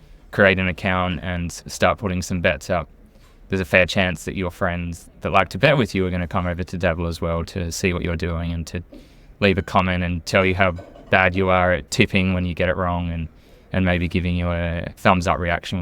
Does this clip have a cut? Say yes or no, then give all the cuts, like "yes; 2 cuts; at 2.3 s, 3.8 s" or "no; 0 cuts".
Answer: yes; 1 cut; at 5.1 s